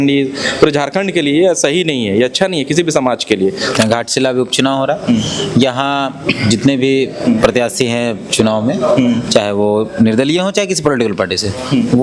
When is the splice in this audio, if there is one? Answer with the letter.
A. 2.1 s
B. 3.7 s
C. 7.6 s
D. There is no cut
B